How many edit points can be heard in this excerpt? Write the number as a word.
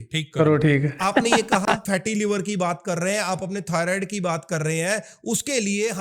one